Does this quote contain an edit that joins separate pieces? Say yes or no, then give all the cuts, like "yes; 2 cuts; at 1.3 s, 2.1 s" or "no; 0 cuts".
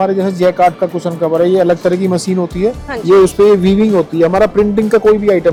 no; 0 cuts